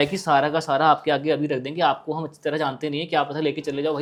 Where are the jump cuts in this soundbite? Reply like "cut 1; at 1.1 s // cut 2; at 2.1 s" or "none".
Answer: none